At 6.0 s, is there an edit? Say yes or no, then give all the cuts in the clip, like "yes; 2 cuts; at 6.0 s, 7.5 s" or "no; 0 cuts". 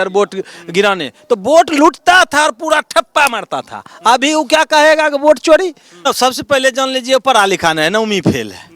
yes; 1 cut; at 6.0 s